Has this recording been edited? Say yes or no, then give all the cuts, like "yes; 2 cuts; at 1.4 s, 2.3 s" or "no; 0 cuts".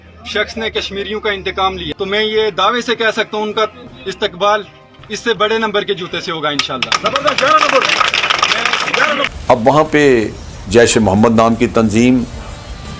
yes; 2 cuts; at 1.8 s, 9.3 s